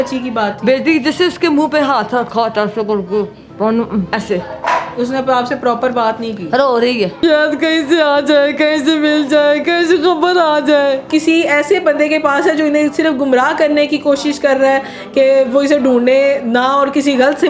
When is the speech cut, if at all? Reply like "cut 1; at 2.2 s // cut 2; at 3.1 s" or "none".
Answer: cut 1; at 4.1 s // cut 2; at 7.2 s // cut 3; at 11.1 s